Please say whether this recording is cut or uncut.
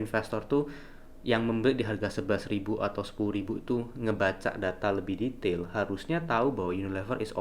uncut